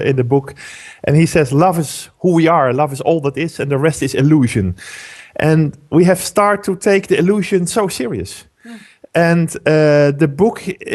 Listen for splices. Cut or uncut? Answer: uncut